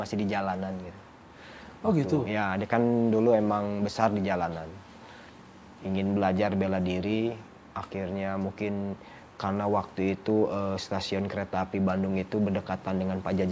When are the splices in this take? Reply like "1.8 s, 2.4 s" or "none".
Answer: none